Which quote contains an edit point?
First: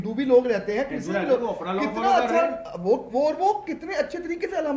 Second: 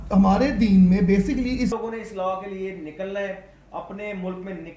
second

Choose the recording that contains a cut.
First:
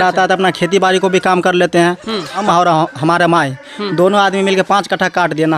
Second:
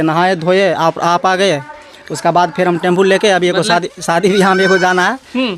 first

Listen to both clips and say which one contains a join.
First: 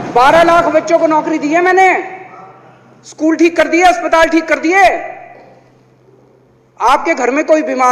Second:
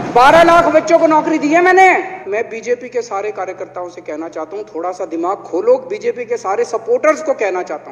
second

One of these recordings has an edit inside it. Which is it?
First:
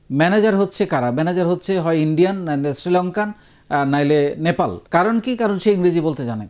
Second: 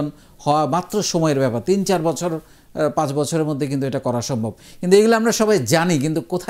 first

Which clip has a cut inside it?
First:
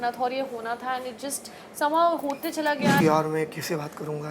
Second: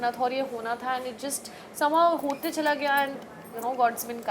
first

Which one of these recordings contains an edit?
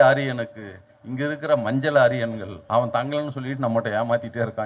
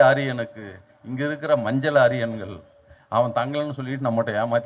first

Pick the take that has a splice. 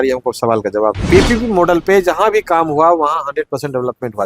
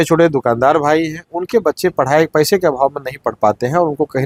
first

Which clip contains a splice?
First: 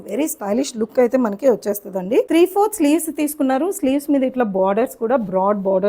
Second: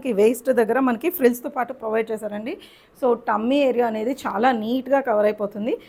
first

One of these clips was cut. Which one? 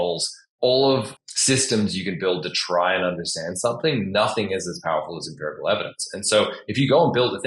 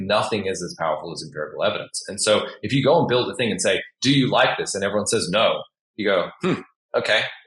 first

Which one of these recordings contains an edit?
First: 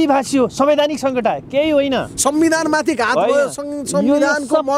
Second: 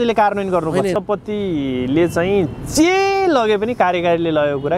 second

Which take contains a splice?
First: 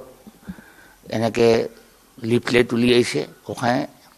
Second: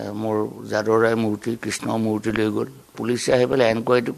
second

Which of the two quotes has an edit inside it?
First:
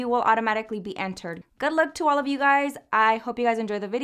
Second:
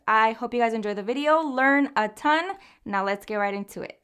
first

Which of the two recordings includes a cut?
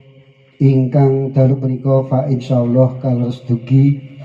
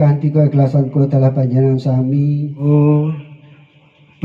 second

